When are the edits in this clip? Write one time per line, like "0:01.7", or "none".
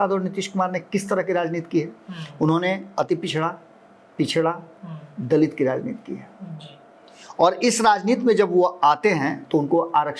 none